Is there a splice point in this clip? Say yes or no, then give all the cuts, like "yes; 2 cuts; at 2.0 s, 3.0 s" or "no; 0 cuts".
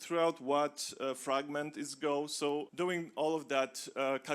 yes; 1 cut; at 2.7 s